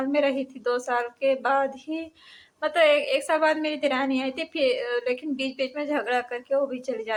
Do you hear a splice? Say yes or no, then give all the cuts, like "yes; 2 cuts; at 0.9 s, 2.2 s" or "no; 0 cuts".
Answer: no; 0 cuts